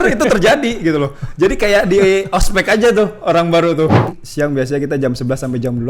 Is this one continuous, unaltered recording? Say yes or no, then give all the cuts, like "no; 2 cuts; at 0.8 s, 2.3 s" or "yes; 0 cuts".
no; 1 cut; at 4.1 s